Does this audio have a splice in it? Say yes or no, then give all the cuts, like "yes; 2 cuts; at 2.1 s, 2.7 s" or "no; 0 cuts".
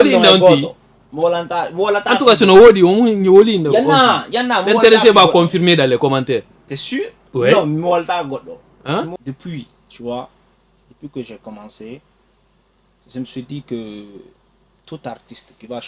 yes; 1 cut; at 9.1 s